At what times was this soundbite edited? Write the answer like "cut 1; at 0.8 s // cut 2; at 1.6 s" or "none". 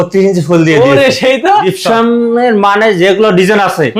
cut 1; at 1.6 s